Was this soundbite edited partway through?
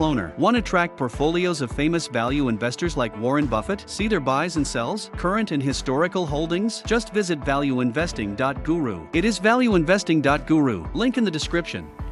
no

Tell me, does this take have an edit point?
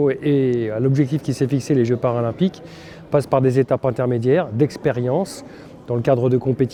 no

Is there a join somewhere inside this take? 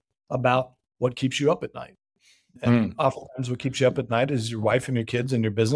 no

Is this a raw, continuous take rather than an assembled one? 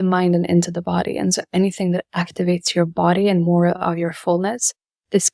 yes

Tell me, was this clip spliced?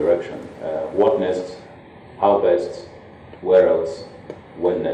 no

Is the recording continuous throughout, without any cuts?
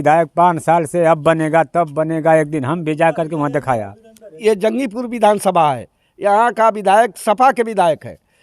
no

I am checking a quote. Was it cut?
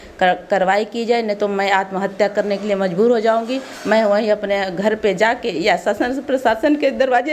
no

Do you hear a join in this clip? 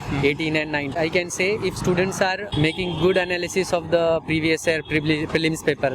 yes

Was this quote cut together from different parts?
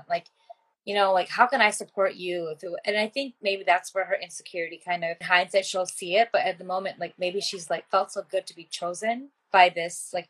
yes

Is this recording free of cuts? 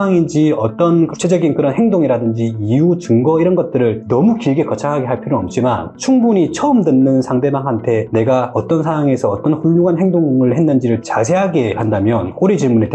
yes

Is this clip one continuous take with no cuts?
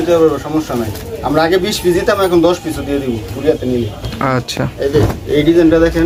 yes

